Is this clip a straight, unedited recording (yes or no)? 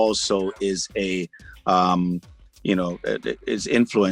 yes